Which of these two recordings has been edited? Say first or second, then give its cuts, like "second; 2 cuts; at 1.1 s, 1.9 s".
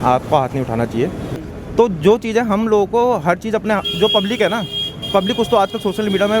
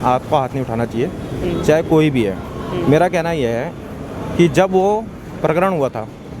first; 1 cut; at 1.3 s